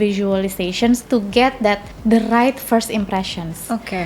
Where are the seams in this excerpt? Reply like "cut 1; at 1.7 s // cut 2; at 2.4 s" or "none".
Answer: cut 1; at 1.0 s // cut 2; at 1.9 s